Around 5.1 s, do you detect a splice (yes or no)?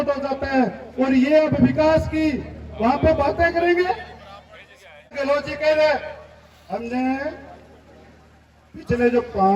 yes